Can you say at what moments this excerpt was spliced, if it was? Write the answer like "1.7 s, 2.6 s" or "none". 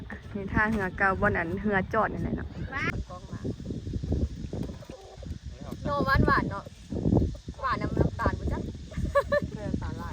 2.9 s

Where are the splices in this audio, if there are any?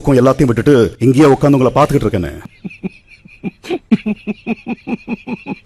none

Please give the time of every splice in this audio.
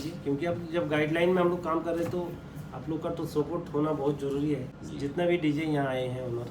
4.8 s

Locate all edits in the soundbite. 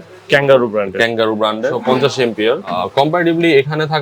1.8 s, 2.8 s

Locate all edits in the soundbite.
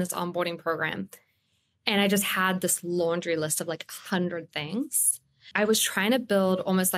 5.5 s

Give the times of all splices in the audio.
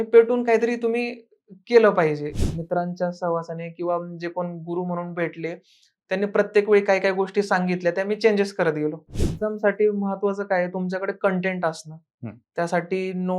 2.4 s, 9.2 s

